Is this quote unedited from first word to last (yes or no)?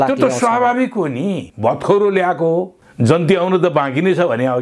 no